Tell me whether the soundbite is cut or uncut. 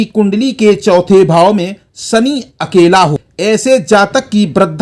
cut